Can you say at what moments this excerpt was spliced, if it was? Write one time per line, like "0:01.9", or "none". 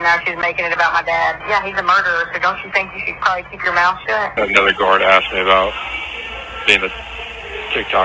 0:01.4
0:04.3